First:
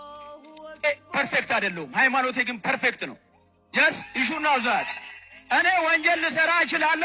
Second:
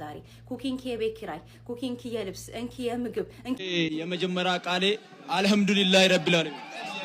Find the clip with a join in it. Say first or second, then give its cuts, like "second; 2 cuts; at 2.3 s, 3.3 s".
second; 1 cut; at 3.6 s